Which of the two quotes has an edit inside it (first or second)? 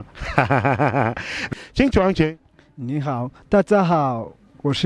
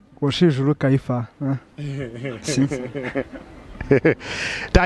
first